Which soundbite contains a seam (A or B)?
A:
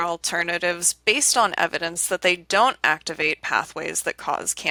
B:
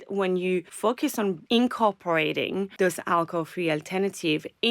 B